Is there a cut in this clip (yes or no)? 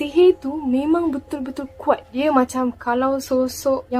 yes